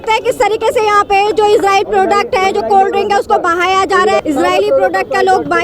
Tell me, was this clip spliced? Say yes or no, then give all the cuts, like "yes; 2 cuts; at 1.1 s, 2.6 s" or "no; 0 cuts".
yes; 1 cut; at 4.2 s